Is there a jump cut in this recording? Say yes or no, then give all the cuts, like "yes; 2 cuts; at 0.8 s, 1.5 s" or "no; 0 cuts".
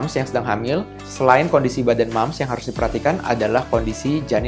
no; 0 cuts